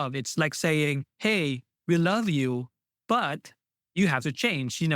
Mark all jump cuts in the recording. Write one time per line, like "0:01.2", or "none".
0:01.4
0:03.7